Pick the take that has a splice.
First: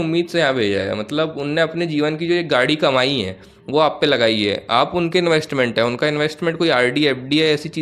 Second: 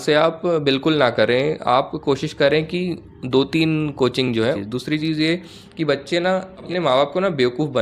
second; 2 cuts; at 4.3 s, 6.6 s

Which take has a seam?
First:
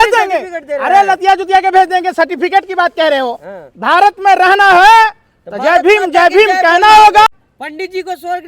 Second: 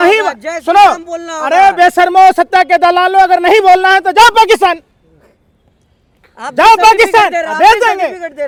first; 1 cut; at 7.3 s

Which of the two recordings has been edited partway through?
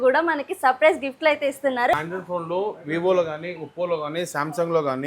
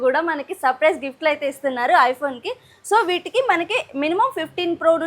first; 1 cut; at 1.9 s

